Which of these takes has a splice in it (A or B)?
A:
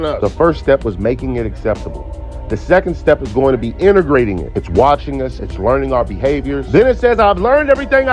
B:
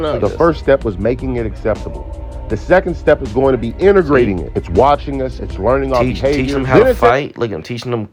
A